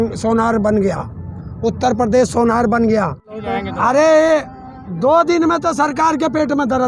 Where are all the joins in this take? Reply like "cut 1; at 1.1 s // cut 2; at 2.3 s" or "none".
cut 1; at 3.5 s